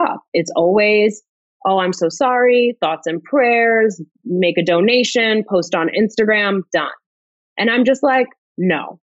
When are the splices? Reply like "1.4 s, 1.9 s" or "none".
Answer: none